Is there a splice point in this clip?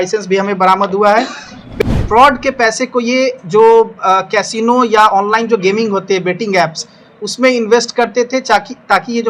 yes; 1 cut; at 2.0 s

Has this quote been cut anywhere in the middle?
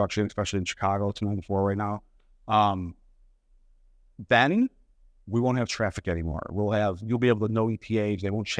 no; 0 cuts

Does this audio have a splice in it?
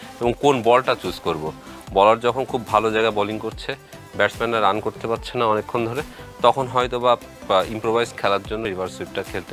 yes; 1 cut; at 8.6 s

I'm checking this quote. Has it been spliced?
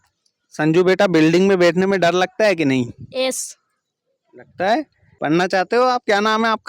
yes; 1 cut; at 5.0 s

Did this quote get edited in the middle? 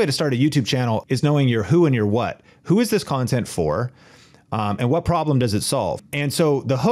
yes; 2 cuts; at 1.0 s, 6.0 s

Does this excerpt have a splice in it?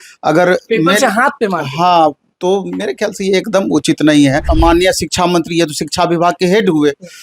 yes; 1 cut; at 4.5 s

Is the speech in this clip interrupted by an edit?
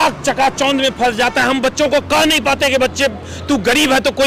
no; 0 cuts

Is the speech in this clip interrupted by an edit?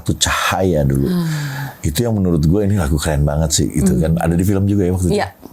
no; 0 cuts

